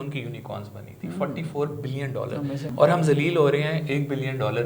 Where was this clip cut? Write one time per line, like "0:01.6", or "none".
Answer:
0:02.7